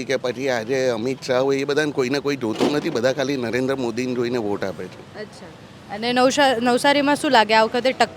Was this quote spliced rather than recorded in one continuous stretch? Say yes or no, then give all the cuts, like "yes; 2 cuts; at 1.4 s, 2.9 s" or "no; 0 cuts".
no; 0 cuts